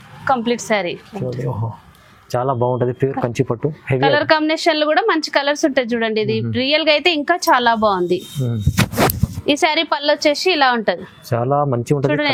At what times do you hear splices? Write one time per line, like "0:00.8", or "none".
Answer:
none